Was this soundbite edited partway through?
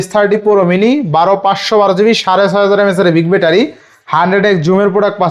no; 0 cuts

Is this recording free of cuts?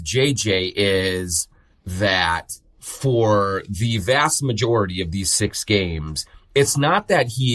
yes; 0 cuts

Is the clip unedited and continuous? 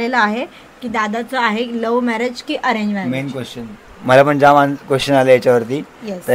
yes; 0 cuts

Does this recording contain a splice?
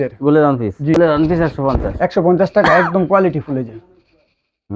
yes; 1 cut; at 1.0 s

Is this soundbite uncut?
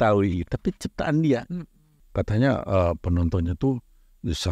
no; 1 cut; at 2.0 s

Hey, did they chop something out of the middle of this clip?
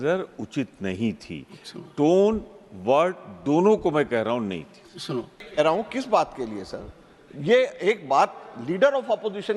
yes; 1 cut; at 5.3 s

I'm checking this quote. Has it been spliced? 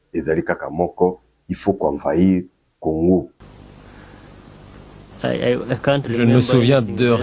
yes; 1 cut; at 3.4 s

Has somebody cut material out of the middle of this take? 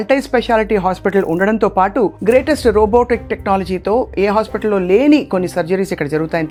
no; 0 cuts

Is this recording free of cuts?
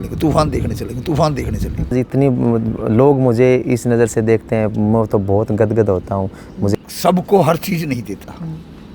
no; 2 cuts; at 1.9 s, 6.7 s

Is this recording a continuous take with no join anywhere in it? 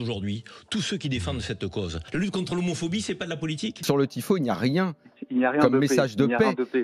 no; 2 cuts; at 2.0 s, 3.8 s

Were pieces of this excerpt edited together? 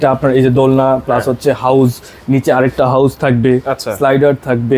no; 0 cuts

